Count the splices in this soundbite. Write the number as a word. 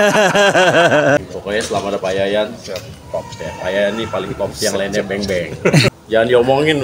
two